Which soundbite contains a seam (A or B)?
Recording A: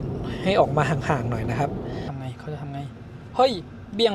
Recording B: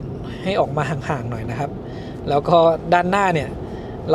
A